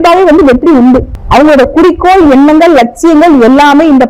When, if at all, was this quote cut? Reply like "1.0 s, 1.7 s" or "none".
1.2 s